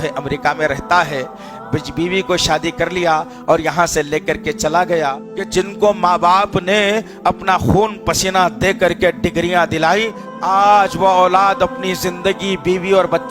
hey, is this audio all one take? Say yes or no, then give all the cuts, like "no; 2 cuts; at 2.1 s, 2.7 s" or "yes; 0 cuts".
no; 2 cuts; at 5.3 s, 10.2 s